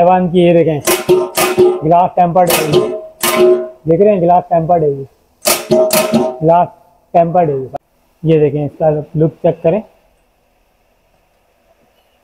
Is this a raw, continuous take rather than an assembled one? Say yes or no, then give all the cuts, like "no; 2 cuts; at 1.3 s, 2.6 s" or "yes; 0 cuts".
no; 1 cut; at 7.7 s